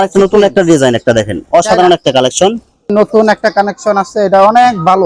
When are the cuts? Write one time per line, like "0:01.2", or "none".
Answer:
0:02.8